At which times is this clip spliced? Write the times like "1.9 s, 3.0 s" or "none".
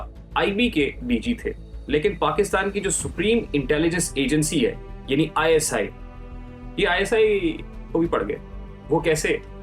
none